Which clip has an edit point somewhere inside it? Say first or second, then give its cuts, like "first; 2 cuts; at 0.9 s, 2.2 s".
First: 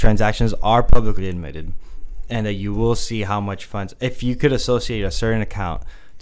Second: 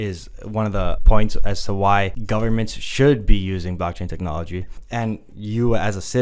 second; 3 cuts; at 1.0 s, 2.2 s, 4.7 s